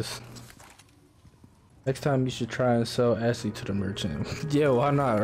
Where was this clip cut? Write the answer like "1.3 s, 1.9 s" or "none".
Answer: 1.7 s